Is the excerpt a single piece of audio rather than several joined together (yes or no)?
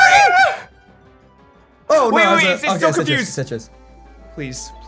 yes